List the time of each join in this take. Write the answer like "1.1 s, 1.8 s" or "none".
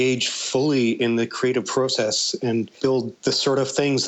3.1 s